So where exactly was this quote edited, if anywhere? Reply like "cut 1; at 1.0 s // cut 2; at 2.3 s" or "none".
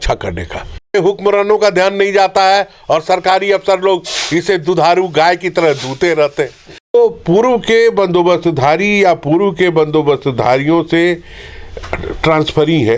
cut 1; at 0.9 s // cut 2; at 6.9 s